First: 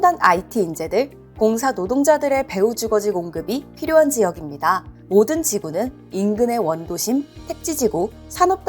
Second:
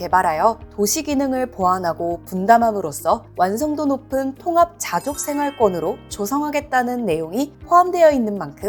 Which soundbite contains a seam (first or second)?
first